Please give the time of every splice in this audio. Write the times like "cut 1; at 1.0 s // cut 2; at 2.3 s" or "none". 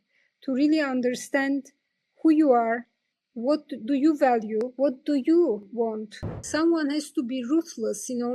cut 1; at 6.5 s